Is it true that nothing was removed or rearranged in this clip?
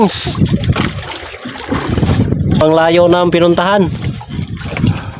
no; 1 cut; at 2.6 s

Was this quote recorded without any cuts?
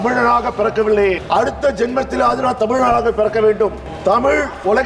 no; 2 cuts; at 1.2 s, 3.9 s

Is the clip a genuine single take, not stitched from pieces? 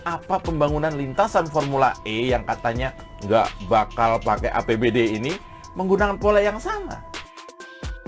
no; 1 cut; at 7.0 s

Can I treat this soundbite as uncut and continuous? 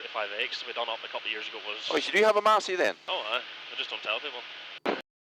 yes; 0 cuts

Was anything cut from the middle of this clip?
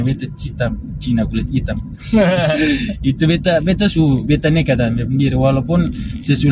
no; 0 cuts

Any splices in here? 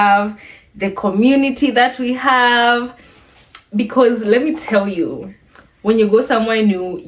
no; 0 cuts

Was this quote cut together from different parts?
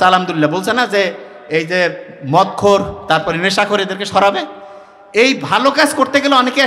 no; 0 cuts

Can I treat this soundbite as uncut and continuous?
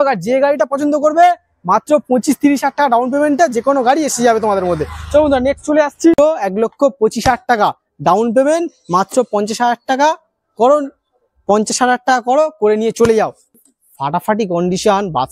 no; 2 cuts; at 6.2 s, 13.5 s

